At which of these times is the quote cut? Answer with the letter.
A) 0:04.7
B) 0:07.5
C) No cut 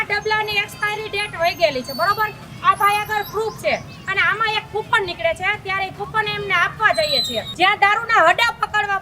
B